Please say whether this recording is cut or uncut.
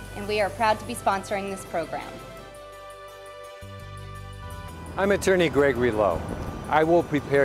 cut